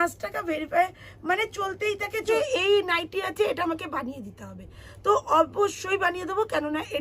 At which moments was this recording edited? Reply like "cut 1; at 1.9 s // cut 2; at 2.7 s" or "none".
cut 1; at 2.2 s